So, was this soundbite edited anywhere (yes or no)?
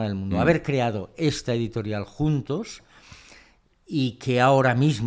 no